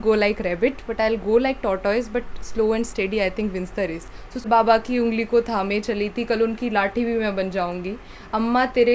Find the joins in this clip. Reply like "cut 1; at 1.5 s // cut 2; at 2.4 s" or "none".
cut 1; at 4.5 s